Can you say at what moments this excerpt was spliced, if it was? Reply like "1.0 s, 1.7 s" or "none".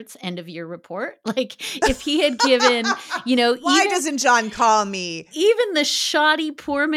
none